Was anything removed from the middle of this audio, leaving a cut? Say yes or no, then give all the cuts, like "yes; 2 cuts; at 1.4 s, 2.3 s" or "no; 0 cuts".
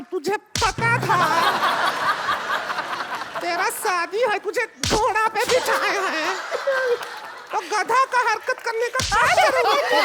no; 0 cuts